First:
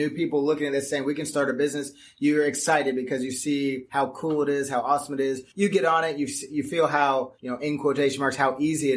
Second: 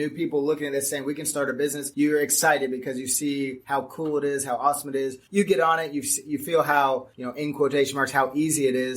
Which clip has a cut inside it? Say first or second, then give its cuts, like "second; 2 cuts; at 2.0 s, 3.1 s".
second; 1 cut; at 1.8 s